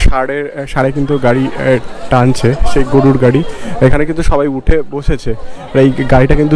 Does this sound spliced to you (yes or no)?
no